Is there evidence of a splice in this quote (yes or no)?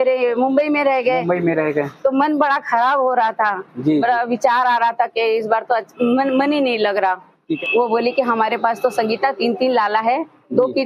yes